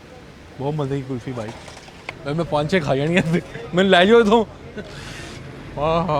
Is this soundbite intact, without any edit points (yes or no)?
yes